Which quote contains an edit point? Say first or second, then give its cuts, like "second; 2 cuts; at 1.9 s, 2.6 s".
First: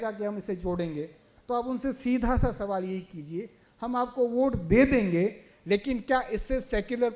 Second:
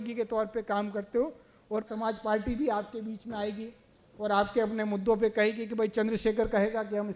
second; 1 cut; at 1.9 s